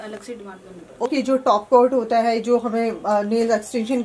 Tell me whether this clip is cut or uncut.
cut